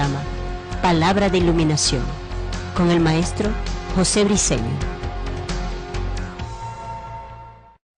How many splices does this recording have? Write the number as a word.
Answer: zero